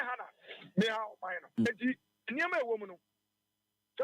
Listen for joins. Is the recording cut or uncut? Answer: cut